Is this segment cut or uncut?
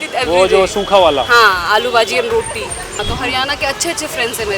cut